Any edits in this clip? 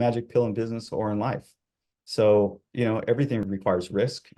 yes; 1 cut; at 3.5 s

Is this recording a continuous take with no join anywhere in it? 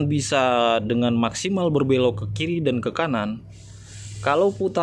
yes; 0 cuts

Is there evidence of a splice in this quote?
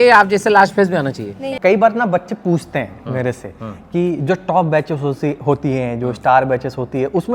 yes; 1 cut; at 1.4 s

